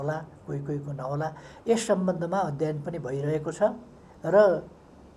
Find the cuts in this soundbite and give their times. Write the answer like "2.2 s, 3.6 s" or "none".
none